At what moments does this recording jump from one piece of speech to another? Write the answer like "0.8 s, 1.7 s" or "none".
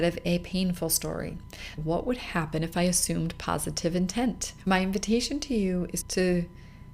1.7 s, 4.7 s, 6.0 s